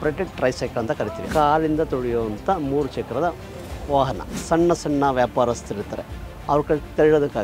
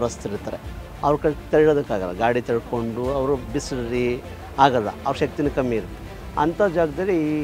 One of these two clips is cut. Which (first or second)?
first